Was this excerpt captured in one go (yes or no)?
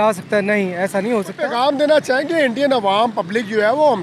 no